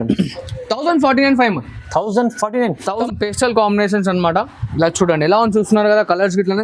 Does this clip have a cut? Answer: yes; 1 cut; at 3.0 s

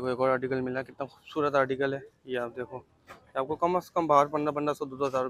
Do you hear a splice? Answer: no; 0 cuts

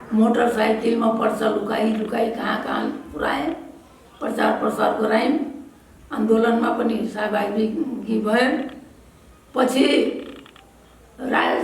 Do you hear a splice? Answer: no; 0 cuts

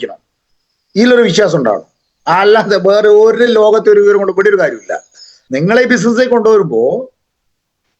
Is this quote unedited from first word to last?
no; 1 cut; at 5.4 s

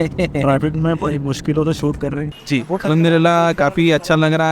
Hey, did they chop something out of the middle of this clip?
yes; 1 cut; at 2.3 s

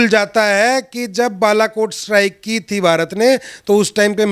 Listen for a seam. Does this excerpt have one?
no; 0 cuts

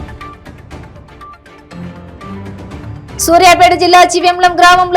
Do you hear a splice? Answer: no; 0 cuts

